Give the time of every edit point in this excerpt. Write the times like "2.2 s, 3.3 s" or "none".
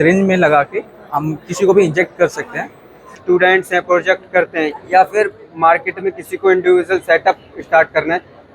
3.2 s